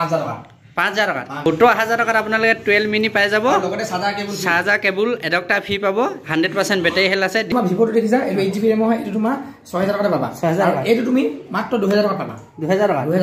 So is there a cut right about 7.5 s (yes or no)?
yes